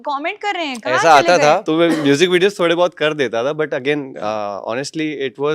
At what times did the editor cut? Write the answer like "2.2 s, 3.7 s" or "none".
1.6 s